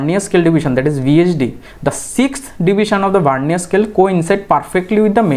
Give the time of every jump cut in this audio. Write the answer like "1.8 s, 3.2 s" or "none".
none